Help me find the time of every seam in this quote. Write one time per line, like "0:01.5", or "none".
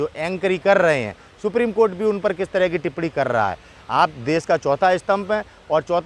none